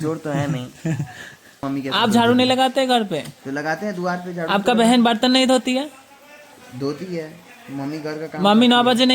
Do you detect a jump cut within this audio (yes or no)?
yes